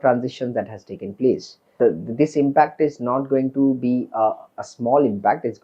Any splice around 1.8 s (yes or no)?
yes